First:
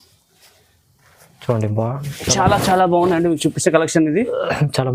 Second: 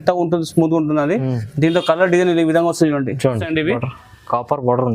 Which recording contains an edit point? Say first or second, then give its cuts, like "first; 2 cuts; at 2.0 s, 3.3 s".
second; 1 cut; at 3.4 s